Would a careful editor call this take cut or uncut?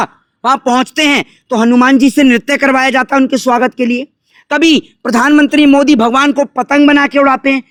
uncut